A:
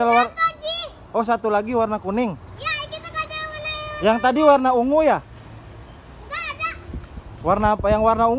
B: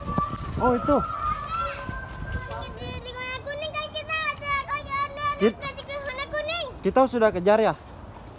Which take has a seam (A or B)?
B